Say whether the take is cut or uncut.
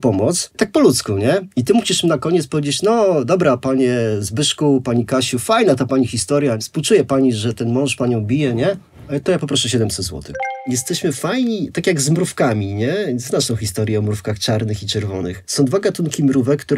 cut